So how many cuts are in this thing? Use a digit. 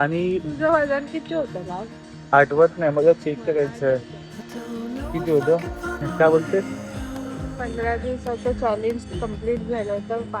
1